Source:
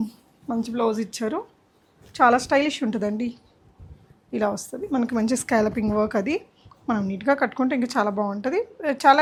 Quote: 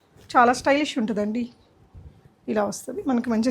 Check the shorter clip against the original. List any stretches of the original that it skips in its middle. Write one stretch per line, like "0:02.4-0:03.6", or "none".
none